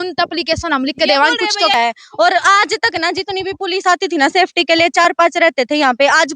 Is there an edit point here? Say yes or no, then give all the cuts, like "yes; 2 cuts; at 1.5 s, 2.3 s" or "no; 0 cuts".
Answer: yes; 1 cut; at 1.7 s